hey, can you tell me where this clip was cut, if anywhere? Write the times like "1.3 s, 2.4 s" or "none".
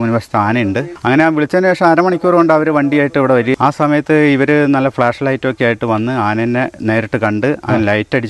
0.9 s, 3.5 s